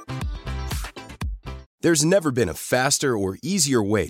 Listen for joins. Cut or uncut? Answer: cut